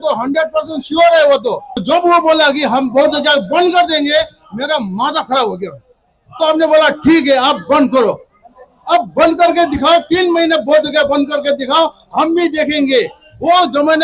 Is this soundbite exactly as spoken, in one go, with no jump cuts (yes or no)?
no